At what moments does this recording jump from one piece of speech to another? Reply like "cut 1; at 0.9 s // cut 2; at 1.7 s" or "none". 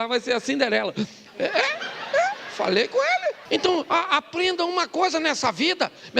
cut 1; at 3.4 s